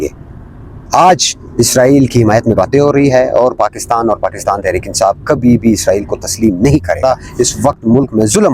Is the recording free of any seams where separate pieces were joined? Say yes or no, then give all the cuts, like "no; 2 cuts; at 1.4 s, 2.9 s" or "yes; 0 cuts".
no; 1 cut; at 7.0 s